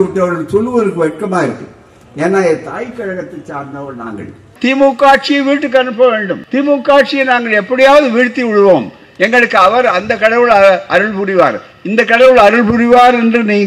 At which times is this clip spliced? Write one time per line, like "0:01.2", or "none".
0:04.5
0:06.4